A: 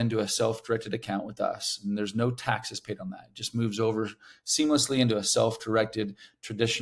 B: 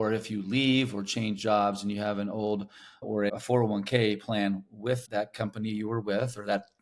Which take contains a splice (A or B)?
B